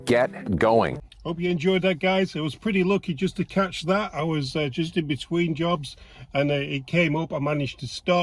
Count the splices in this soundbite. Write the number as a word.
zero